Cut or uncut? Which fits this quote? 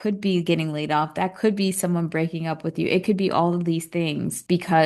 uncut